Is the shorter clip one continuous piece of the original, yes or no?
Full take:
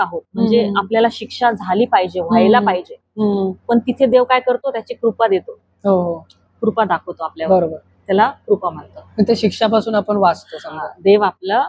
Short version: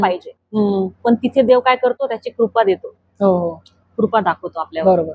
yes